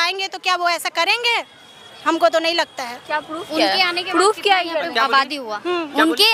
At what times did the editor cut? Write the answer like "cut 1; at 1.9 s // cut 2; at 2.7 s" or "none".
none